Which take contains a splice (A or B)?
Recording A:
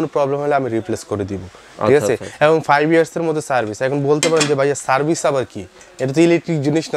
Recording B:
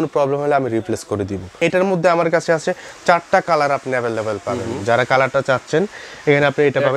B